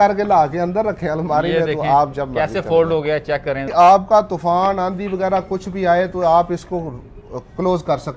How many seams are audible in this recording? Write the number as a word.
one